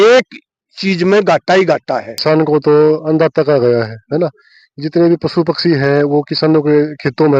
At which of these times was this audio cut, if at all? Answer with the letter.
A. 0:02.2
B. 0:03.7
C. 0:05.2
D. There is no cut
A